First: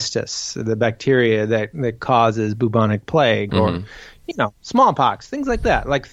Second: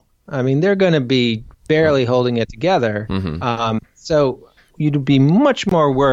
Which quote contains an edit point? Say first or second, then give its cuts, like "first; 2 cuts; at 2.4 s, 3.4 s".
second; 2 cuts; at 1.5 s, 4.7 s